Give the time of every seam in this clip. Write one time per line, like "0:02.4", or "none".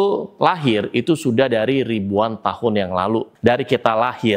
0:03.3

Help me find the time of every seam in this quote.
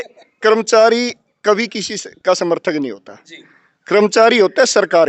none

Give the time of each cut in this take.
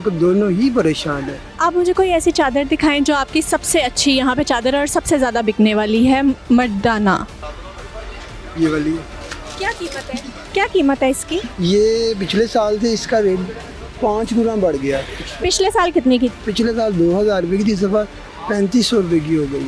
none

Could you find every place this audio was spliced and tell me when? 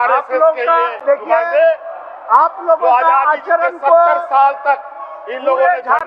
none

